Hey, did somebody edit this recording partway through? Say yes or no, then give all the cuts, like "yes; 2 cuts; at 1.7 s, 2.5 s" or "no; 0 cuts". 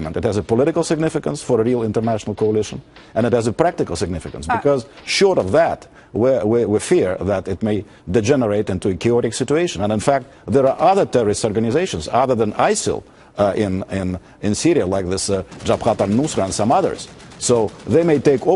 no; 0 cuts